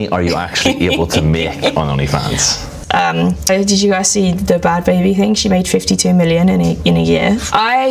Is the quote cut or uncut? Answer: cut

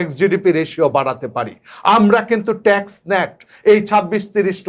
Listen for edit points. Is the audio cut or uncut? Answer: uncut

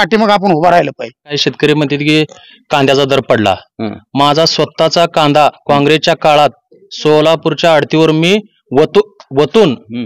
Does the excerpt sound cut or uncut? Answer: cut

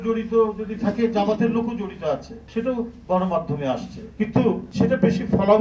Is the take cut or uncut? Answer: uncut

